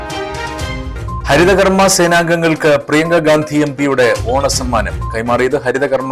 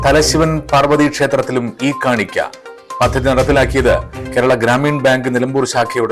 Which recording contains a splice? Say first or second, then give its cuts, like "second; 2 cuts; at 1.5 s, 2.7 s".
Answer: first; 1 cut; at 0.9 s